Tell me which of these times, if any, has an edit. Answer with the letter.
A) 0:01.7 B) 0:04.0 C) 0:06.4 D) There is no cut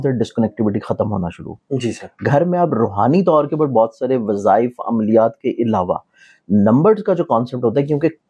D